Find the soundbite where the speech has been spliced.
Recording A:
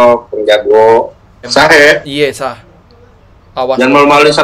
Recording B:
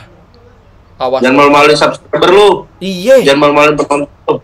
A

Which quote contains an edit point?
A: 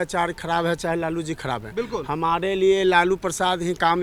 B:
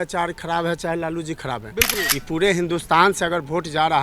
B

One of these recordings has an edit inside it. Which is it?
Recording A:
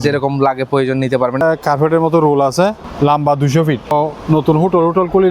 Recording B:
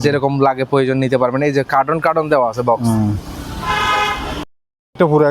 A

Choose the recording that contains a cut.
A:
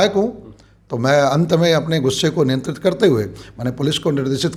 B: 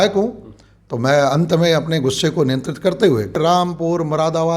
B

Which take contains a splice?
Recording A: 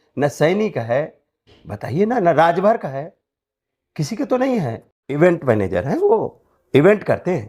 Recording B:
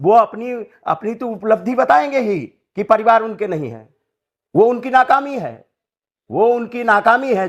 A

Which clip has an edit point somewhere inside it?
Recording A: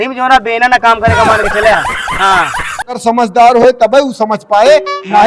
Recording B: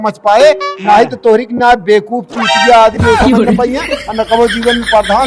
A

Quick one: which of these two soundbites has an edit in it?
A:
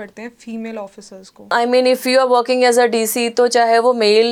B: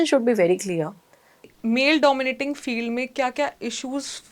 B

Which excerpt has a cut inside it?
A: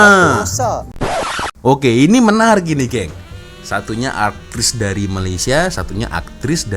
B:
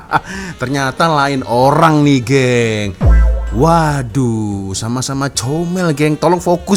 A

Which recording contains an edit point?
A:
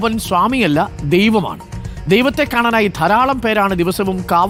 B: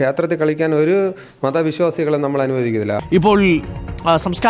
B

